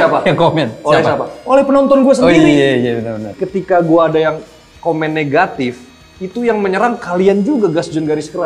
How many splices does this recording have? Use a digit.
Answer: 1